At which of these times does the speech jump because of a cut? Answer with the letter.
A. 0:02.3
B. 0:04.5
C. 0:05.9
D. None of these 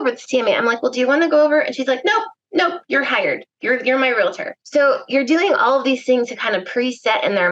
B